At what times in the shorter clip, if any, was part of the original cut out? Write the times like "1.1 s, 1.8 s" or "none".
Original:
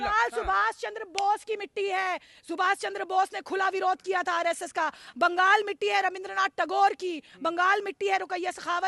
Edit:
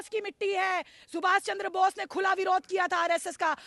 none